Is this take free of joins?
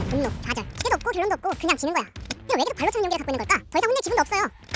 yes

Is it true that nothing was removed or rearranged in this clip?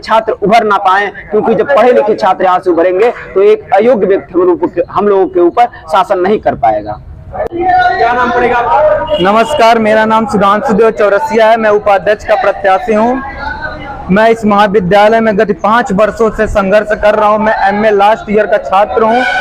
yes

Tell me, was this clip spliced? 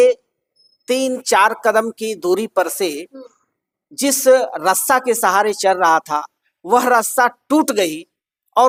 no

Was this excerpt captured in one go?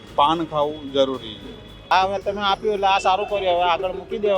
no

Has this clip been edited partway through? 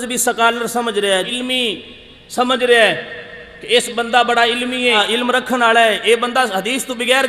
yes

